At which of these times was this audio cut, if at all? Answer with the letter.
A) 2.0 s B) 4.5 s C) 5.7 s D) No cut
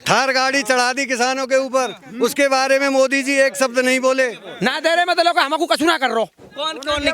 B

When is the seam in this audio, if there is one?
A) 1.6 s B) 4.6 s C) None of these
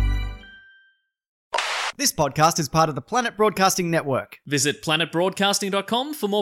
A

